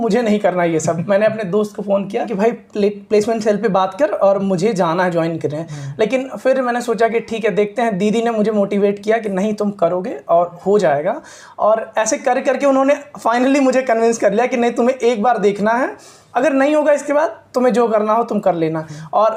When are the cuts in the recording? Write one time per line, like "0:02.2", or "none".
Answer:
none